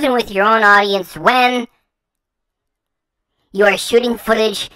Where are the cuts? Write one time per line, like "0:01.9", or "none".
none